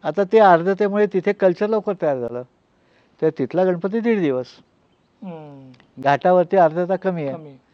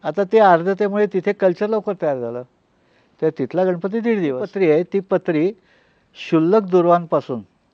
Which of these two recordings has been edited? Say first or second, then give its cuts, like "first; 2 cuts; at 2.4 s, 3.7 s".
second; 1 cut; at 4.5 s